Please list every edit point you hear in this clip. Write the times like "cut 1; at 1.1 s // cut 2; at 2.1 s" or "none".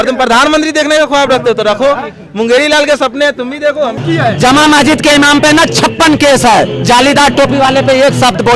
cut 1; at 4.0 s

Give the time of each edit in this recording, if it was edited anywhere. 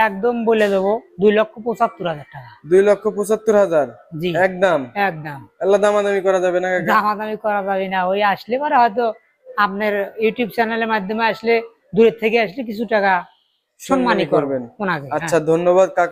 none

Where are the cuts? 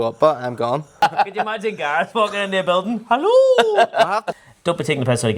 cut 1; at 1.0 s // cut 2; at 4.3 s

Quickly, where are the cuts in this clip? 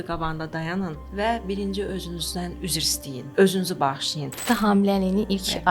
cut 1; at 1.0 s // cut 2; at 2.7 s // cut 3; at 4.4 s

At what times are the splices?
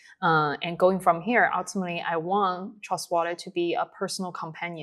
none

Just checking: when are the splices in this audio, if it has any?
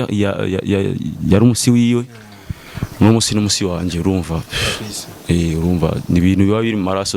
none

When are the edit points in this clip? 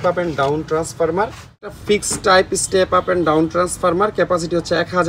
cut 1; at 1.7 s

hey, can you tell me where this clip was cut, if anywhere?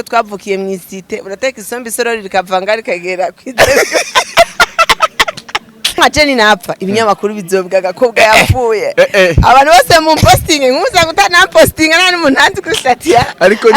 cut 1; at 6.0 s

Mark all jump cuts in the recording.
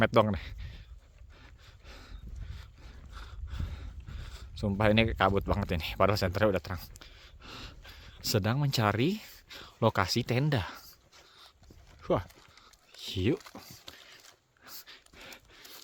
none

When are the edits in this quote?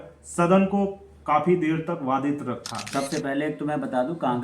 cut 1; at 2.9 s

